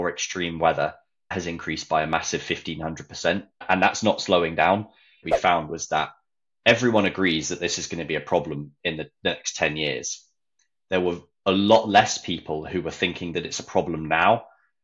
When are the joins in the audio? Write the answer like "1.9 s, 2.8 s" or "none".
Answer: 1.3 s, 3.6 s, 5.2 s